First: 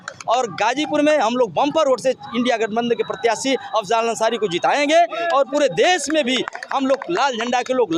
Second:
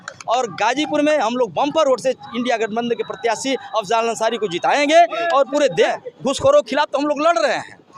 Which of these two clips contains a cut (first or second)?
second